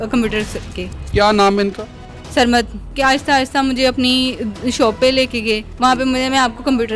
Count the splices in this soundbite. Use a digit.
2